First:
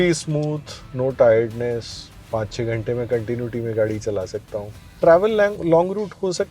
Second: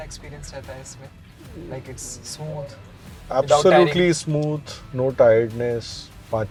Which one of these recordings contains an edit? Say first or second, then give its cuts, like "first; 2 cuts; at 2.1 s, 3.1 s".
first; 1 cut; at 4.8 s